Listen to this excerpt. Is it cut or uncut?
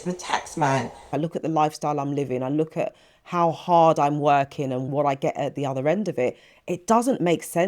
cut